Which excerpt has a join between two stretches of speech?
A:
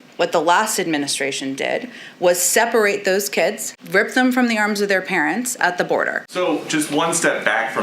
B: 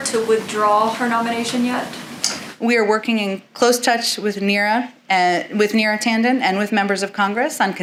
A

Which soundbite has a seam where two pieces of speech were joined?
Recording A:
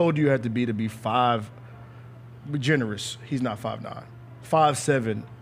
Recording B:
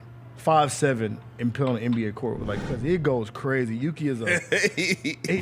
B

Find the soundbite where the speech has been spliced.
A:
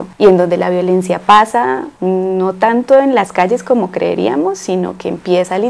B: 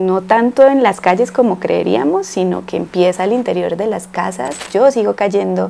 B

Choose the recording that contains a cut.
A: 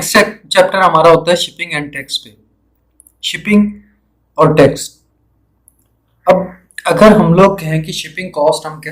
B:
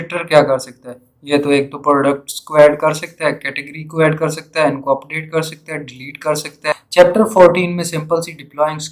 B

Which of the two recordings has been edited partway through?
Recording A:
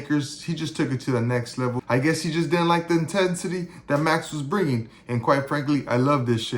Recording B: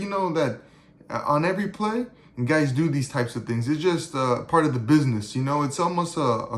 A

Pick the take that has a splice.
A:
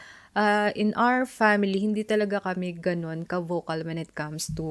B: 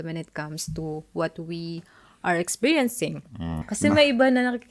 B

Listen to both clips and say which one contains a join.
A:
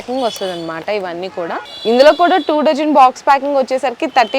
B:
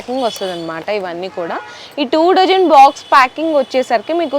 A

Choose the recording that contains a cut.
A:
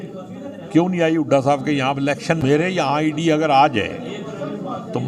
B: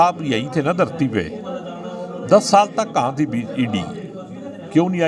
A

